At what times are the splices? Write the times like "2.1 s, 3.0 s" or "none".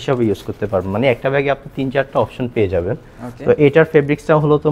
none